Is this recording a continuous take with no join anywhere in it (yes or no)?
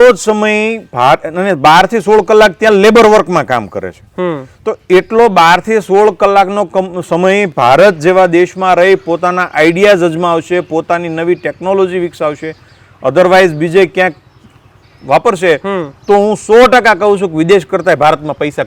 yes